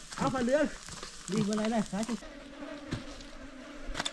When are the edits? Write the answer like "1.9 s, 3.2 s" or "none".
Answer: 2.2 s